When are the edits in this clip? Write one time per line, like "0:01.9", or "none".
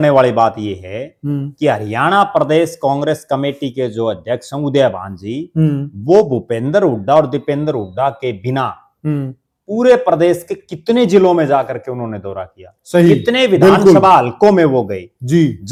none